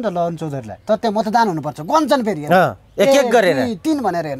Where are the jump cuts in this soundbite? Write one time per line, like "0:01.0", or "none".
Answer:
none